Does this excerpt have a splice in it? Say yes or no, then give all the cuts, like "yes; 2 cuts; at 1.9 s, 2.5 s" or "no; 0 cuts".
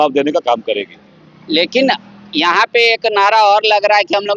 no; 0 cuts